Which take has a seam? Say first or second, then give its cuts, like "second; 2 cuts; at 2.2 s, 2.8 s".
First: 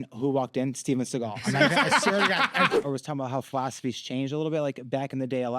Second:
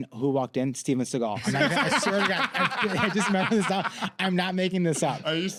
first; 1 cut; at 2.7 s